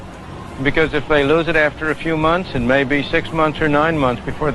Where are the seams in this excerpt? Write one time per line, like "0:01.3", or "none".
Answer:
0:01.6